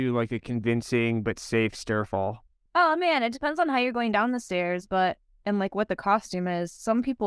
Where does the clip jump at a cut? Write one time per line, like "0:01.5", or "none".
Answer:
0:02.5

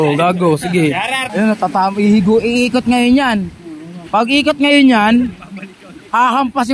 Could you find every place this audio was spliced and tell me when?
0:01.2

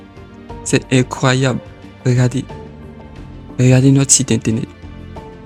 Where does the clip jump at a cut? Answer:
none

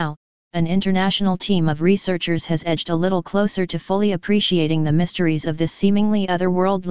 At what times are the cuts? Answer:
0:02.1

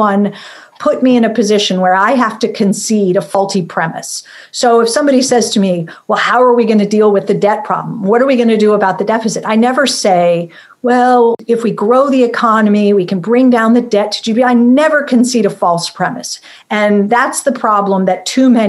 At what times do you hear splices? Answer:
0:03.4
0:11.4

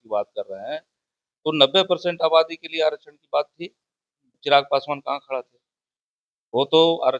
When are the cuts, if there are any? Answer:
0:04.3

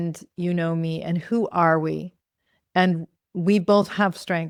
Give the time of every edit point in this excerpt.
none

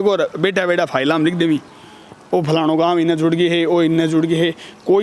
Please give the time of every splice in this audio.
none

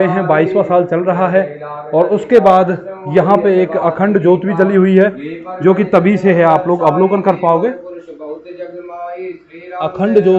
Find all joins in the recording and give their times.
none

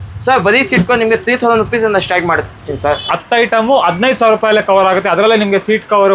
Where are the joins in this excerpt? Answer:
0:03.0

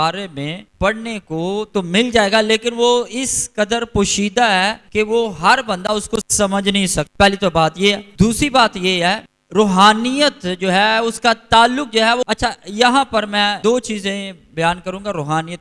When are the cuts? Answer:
0:12.3
0:13.6

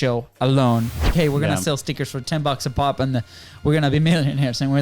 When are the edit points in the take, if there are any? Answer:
0:01.1

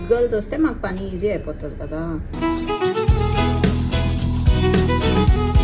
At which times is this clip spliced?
0:02.3

